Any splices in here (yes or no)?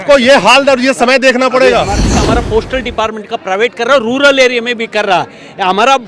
yes